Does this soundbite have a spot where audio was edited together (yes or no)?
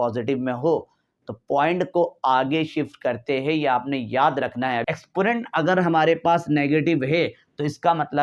yes